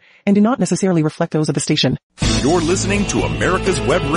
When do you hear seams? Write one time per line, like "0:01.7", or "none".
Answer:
0:02.1